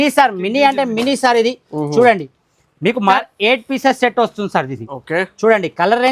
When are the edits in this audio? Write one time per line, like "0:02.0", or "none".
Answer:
0:03.0